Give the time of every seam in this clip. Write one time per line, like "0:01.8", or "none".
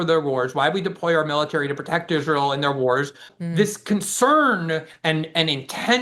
0:03.3